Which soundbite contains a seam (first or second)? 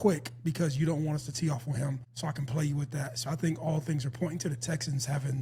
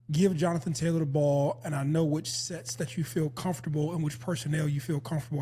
first